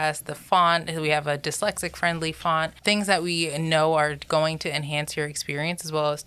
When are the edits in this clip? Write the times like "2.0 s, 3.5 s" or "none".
2.8 s